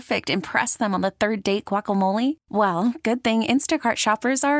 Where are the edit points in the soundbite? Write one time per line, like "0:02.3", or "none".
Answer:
none